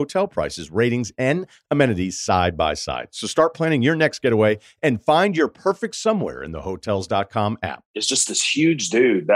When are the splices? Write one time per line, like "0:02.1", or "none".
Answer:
0:07.9